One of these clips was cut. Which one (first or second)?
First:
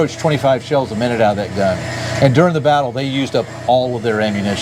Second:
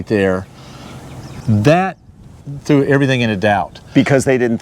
second